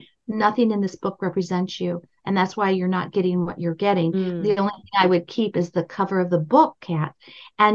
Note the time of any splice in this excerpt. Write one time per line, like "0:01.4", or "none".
none